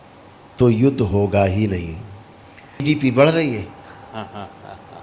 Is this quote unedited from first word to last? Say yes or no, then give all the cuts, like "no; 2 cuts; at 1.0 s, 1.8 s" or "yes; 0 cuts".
no; 1 cut; at 2.8 s